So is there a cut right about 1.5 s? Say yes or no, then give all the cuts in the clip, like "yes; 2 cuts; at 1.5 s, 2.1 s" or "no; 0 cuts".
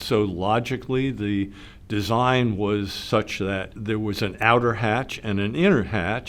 no; 1 cut; at 3.7 s